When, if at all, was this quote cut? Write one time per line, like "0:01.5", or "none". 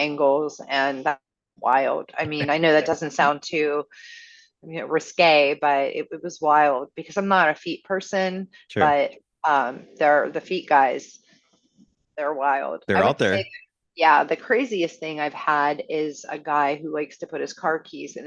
none